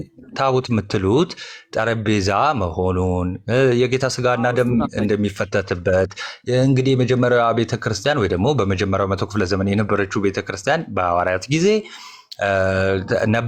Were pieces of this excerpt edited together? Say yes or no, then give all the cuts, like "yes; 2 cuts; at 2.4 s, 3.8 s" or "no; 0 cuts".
no; 0 cuts